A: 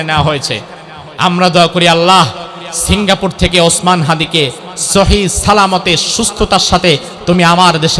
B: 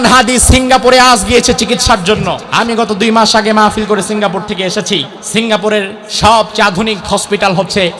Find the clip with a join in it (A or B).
B